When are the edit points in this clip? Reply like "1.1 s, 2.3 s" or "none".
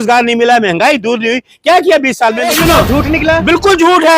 2.5 s